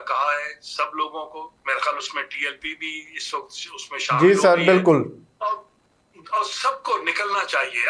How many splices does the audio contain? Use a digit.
0